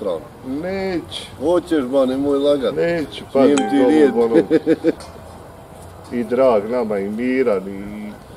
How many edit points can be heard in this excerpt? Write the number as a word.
one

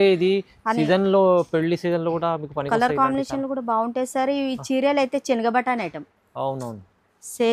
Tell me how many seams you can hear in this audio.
zero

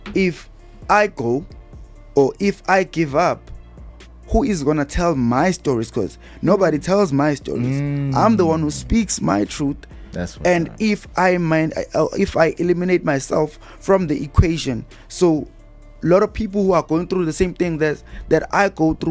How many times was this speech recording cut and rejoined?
zero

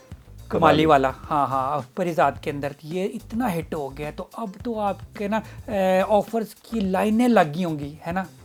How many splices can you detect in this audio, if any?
zero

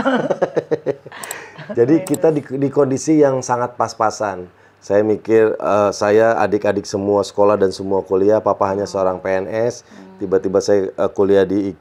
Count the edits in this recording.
zero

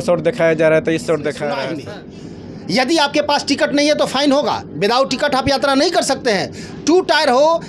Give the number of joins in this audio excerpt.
one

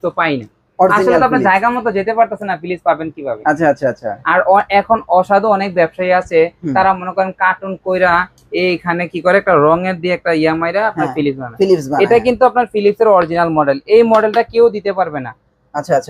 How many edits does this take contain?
zero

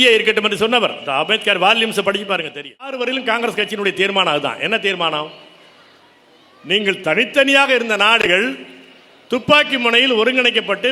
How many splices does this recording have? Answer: one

